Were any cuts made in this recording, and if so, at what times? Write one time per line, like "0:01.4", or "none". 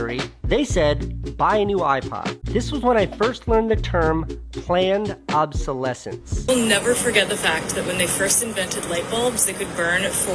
0:02.4
0:06.4